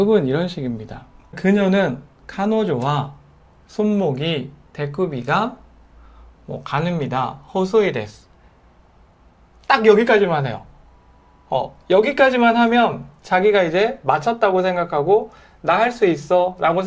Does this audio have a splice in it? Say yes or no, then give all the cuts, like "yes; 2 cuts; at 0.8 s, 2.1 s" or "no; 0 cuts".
yes; 1 cut; at 1.4 s